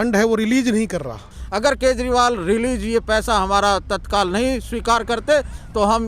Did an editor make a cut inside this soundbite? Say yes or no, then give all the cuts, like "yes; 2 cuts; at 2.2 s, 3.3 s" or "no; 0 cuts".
yes; 1 cut; at 1.3 s